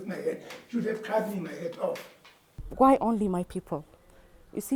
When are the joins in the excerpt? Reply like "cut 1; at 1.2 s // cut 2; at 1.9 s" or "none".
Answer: cut 1; at 2.6 s